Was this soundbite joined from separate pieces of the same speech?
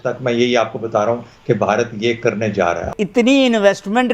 yes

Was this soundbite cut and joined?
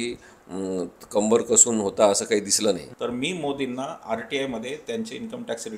yes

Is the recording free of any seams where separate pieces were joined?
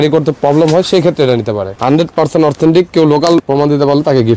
no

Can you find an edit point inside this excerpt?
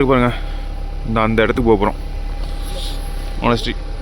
no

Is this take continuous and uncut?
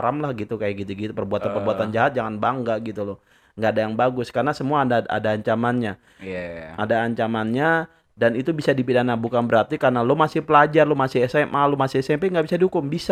yes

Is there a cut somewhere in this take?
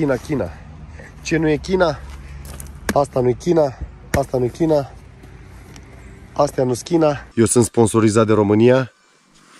yes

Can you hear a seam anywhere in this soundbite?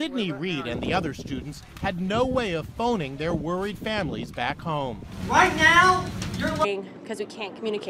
no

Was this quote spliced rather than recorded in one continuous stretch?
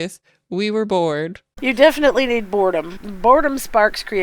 yes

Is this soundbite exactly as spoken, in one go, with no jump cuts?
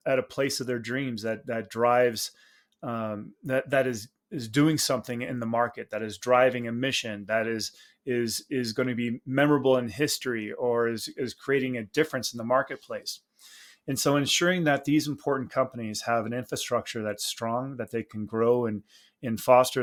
yes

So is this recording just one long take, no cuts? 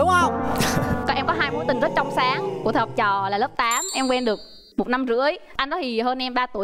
no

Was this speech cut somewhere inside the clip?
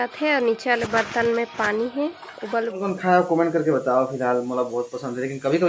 yes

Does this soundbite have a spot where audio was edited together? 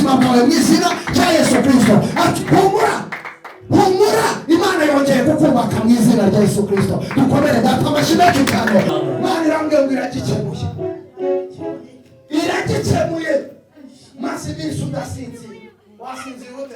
yes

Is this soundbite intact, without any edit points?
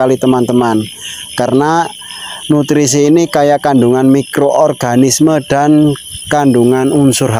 yes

